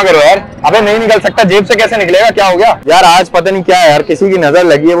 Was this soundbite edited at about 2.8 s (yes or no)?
yes